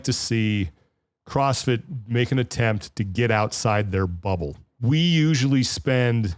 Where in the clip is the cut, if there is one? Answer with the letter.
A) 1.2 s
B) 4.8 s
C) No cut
B